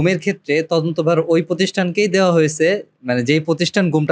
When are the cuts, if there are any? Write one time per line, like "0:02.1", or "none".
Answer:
none

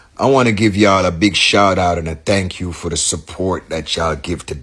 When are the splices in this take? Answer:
none

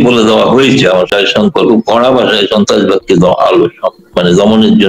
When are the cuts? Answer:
0:01.1

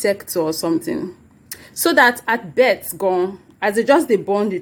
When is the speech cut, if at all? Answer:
none

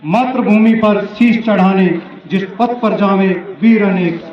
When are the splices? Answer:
none

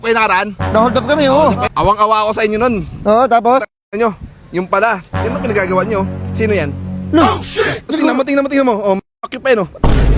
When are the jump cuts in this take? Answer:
0:01.6
0:07.9

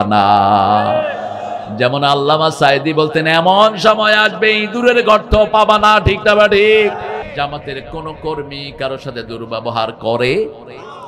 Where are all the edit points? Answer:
0:07.2

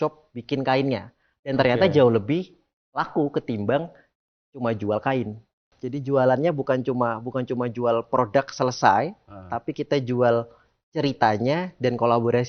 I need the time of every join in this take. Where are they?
0:05.7

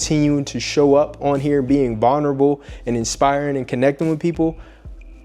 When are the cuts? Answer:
none

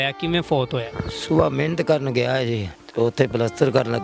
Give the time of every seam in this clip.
0:02.8

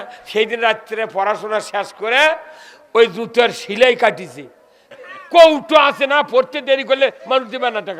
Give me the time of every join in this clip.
0:04.9

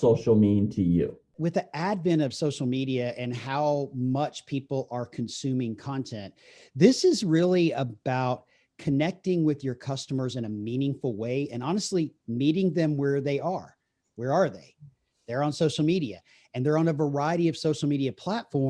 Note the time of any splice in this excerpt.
0:01.2

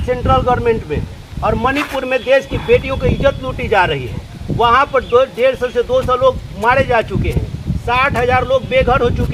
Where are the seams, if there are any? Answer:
none

